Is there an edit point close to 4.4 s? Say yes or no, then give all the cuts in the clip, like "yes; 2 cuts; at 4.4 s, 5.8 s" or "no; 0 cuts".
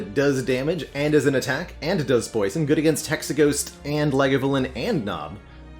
no; 0 cuts